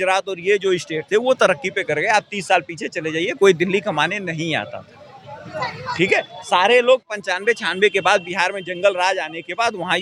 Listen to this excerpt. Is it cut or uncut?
uncut